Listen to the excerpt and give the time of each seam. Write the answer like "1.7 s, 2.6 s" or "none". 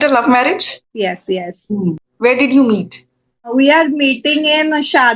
0.9 s, 2.0 s, 3.5 s

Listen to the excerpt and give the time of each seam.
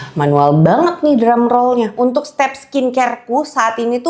1.9 s

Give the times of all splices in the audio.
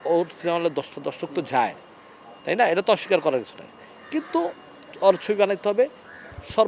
none

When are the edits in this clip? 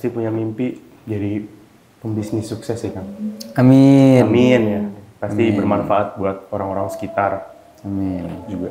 none

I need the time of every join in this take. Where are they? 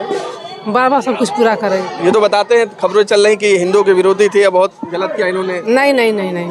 none

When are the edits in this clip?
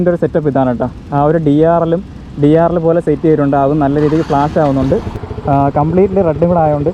5.2 s

